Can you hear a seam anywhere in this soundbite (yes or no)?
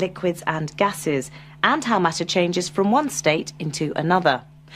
yes